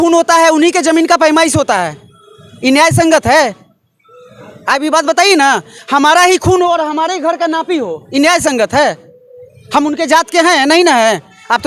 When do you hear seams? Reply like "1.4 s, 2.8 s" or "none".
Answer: none

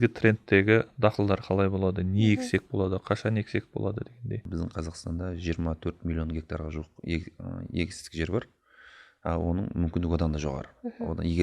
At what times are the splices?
4.4 s

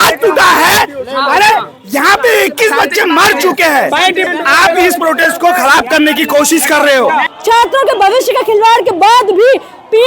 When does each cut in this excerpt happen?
4.3 s, 7.3 s

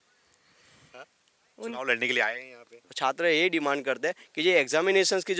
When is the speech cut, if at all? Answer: 2.8 s

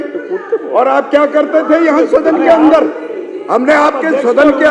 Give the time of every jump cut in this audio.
none

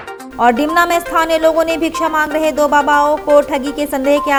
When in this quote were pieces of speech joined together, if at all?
none

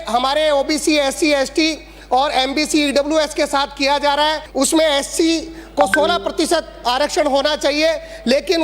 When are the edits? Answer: 4.4 s

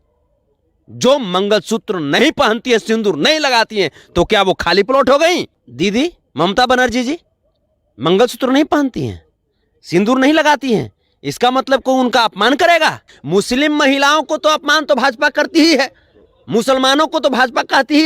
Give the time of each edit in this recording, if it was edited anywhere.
5.6 s, 13.1 s

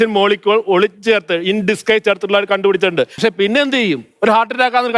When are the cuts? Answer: 3.2 s

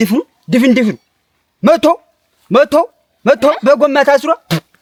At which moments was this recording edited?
none

